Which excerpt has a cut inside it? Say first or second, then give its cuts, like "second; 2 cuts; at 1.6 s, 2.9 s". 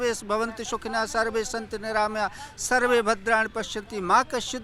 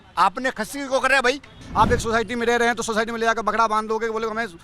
second; 1 cut; at 1.6 s